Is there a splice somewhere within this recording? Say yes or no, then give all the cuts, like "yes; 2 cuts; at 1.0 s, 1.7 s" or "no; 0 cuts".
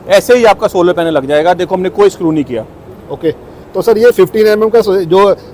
no; 0 cuts